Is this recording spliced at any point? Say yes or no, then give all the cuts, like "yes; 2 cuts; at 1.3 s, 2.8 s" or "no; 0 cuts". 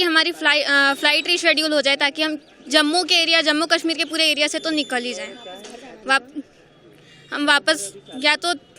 no; 0 cuts